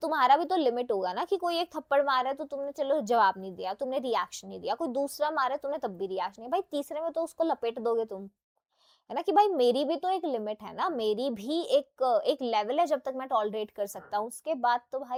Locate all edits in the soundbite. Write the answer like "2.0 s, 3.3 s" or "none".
none